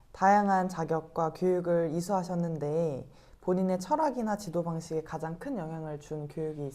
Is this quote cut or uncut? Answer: uncut